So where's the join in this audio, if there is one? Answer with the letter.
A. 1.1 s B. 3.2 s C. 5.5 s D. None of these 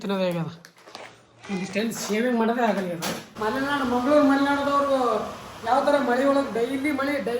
B